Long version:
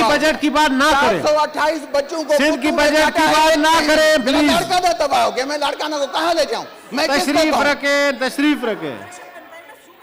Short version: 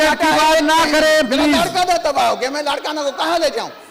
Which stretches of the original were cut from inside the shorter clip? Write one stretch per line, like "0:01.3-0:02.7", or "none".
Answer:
none